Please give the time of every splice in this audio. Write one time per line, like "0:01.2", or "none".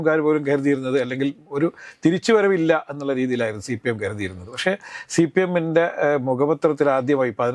none